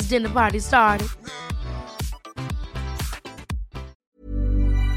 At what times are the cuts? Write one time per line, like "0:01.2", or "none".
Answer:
0:04.0